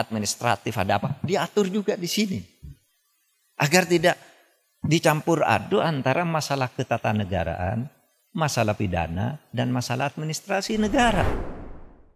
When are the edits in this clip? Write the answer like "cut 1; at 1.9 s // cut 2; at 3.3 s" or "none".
cut 1; at 11.2 s